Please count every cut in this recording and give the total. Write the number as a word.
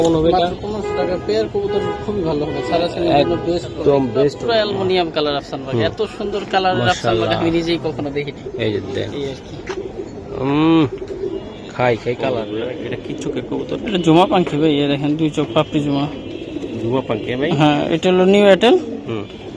two